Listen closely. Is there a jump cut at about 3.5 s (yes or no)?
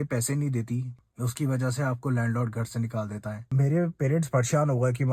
yes